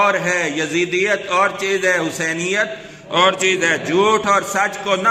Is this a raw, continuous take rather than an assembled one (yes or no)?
yes